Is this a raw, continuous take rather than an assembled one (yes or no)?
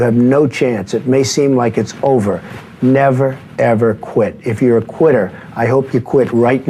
yes